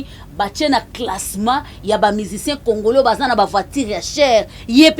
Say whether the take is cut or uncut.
uncut